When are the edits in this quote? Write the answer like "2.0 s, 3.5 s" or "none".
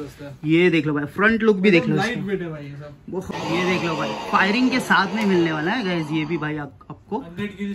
3.3 s